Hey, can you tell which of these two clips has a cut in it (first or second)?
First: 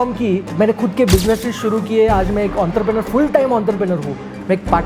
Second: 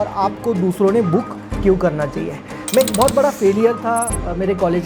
second